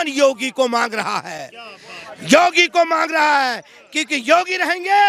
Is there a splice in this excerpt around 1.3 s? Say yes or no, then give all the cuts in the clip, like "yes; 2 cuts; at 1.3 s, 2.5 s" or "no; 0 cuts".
no; 0 cuts